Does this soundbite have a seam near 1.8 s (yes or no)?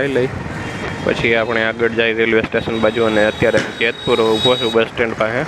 no